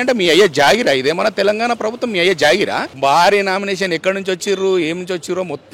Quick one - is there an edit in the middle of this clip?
yes; 1 cut; at 2.9 s

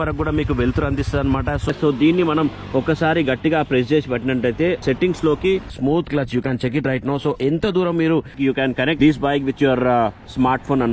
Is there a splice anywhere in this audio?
yes; 4 cuts; at 1.7 s, 4.8 s, 5.7 s, 8.6 s

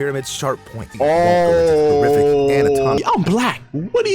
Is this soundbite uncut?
no; 2 cuts; at 0.9 s, 3.0 s

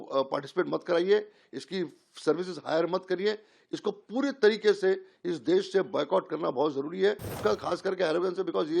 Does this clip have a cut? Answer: yes; 1 cut; at 7.4 s

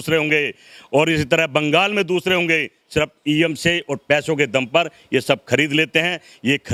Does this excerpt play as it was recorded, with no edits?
yes; 0 cuts

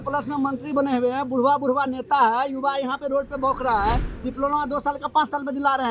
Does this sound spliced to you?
no; 0 cuts

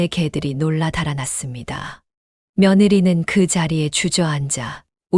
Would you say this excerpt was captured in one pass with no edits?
yes; 0 cuts

